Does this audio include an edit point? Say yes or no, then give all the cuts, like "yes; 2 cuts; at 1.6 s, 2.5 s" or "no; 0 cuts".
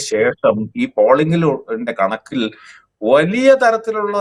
no; 0 cuts